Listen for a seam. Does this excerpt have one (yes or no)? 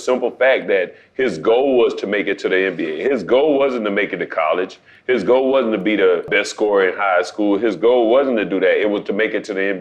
yes